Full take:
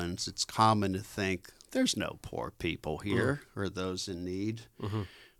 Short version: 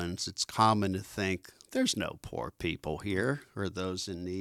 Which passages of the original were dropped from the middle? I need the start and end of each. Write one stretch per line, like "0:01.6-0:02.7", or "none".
none